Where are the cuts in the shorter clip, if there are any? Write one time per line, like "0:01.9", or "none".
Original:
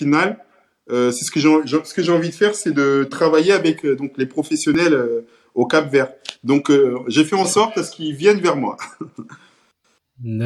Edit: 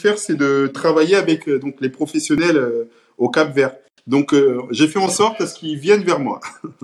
none